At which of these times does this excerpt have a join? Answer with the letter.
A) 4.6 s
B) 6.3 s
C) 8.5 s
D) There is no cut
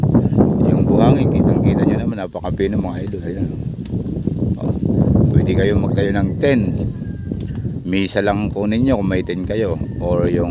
D